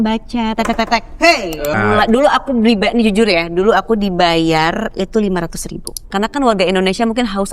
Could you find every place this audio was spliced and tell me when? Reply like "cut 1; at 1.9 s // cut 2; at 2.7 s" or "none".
cut 1; at 1.7 s // cut 2; at 6.1 s